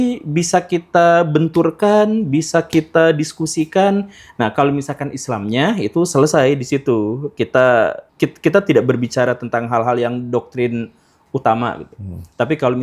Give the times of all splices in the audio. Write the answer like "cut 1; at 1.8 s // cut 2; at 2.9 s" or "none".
cut 1; at 8.0 s